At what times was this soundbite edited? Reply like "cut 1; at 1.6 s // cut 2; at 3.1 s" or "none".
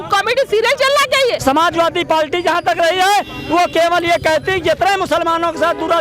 cut 1; at 1.4 s